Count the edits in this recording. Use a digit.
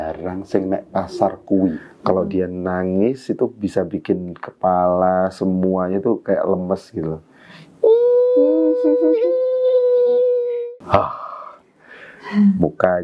2